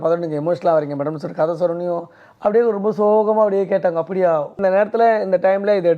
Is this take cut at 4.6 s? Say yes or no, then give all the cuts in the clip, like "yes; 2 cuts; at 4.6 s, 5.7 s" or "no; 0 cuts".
yes; 1 cut; at 4.6 s